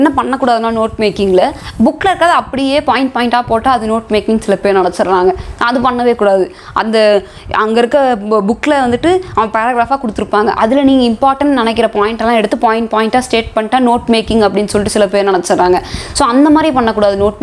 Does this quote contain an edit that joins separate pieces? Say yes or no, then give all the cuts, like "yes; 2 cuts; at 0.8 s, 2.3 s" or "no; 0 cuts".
no; 0 cuts